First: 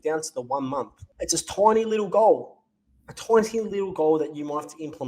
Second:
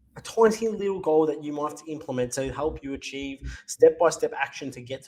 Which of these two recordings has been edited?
first; 1 cut; at 1.0 s

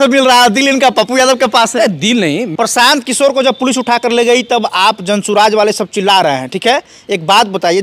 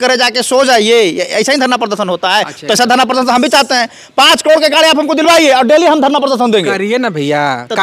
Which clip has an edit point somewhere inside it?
first; 1 cut; at 2.5 s

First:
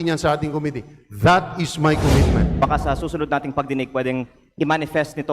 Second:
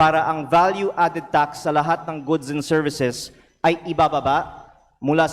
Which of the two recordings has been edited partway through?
first; 1 cut; at 2.6 s

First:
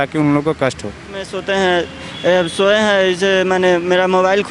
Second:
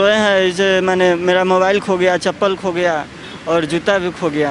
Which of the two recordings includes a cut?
first; 1 cut; at 1.3 s

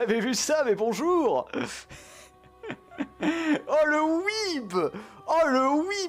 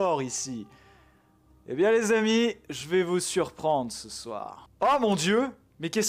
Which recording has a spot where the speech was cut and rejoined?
second; 1 cut; at 4.6 s

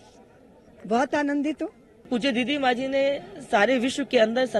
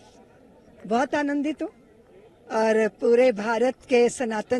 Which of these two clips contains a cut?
first; 1 cut; at 2.1 s

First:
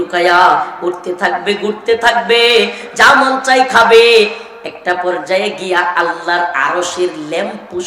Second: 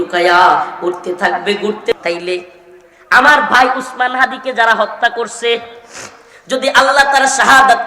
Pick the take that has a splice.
second; 1 cut; at 1.9 s

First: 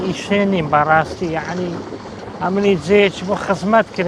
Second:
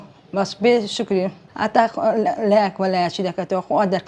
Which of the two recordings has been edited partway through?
second; 1 cut; at 1.4 s

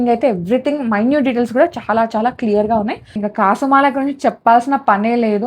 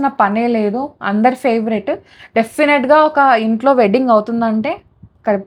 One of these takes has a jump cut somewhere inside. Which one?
first; 1 cut; at 3.2 s

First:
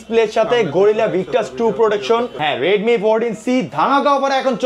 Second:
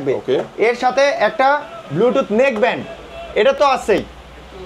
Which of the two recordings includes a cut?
first; 1 cut; at 2.3 s

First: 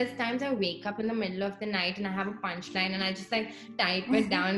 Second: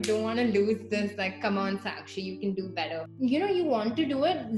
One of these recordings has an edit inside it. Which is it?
second; 1 cut; at 3.1 s

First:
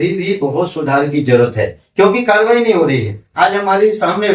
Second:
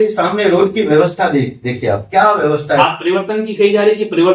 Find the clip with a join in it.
second; 1 cut; at 2.8 s

